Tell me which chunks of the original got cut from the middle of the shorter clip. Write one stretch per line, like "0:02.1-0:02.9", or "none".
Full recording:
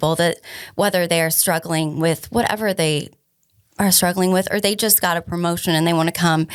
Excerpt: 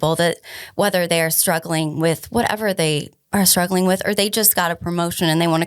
0:03.1-0:03.6

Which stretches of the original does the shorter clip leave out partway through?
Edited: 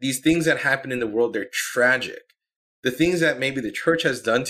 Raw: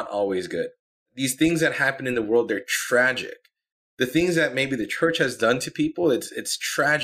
none

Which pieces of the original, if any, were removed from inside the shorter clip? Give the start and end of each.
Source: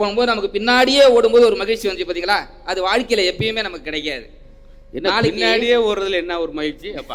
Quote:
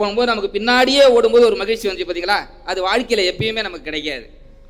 none

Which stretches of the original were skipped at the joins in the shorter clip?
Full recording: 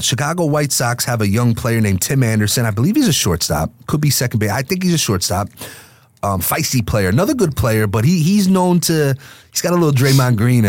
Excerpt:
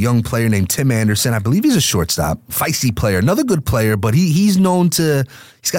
0:03.8-0:06.4

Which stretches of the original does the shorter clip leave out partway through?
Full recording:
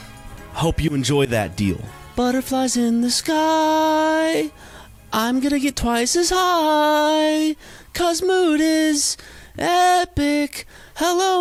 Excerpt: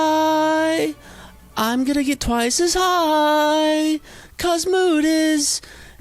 none

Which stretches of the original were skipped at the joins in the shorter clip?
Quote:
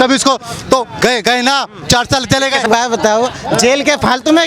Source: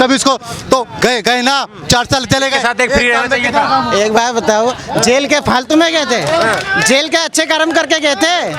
0:02.7-0:04.1

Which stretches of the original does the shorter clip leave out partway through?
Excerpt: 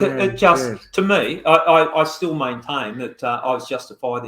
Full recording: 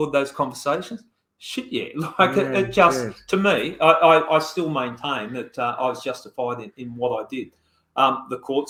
none

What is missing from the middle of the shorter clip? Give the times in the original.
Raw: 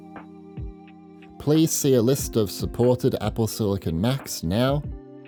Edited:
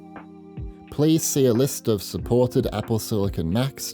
0:00.9-0:01.4

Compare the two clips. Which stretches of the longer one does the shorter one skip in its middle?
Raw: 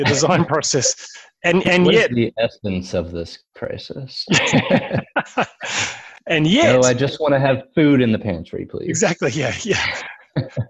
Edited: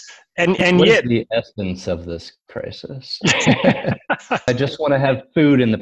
0:05.5-0:06.9

